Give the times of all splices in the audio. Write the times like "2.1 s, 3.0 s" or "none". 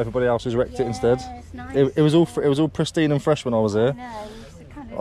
none